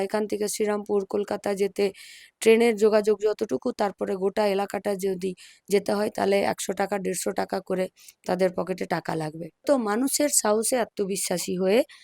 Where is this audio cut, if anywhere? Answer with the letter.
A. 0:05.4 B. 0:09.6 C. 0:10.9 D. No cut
B